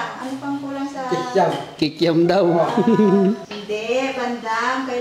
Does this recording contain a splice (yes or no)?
yes